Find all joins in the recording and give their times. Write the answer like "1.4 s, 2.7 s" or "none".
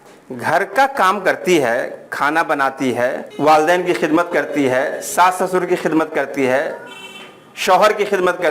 3.3 s